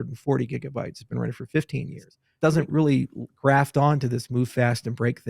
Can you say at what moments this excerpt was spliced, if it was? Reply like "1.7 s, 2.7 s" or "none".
2.2 s

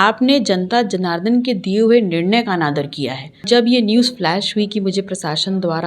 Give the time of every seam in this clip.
3.4 s

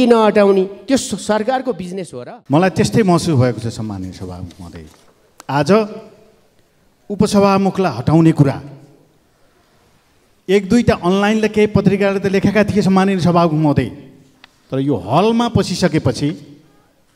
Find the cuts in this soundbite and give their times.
2.4 s

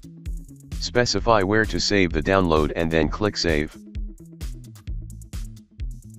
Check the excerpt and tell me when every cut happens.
0.9 s, 3.7 s, 5.1 s

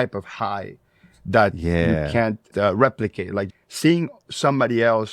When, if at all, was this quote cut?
3.5 s

